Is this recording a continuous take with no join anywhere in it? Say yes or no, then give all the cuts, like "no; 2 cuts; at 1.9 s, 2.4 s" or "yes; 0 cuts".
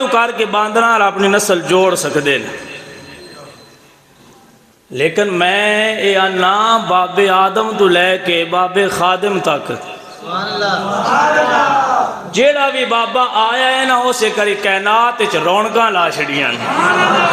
yes; 0 cuts